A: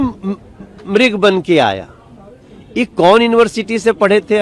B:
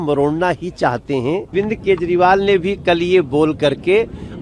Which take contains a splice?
B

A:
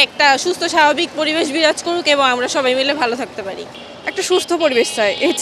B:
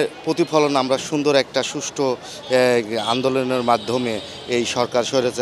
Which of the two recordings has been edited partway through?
A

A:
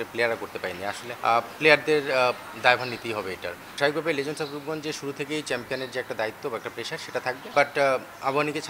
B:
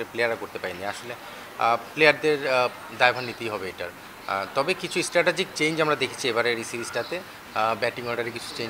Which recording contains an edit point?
A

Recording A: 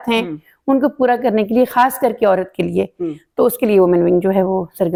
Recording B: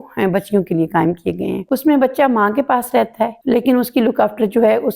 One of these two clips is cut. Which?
B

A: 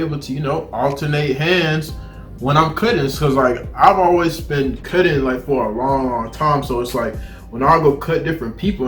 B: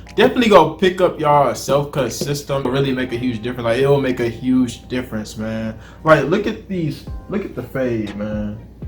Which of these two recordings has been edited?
B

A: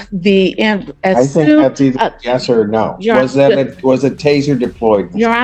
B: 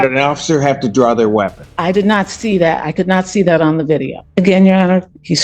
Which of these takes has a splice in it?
B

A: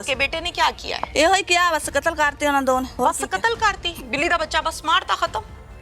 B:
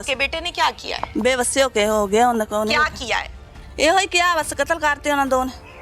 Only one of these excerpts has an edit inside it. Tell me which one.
A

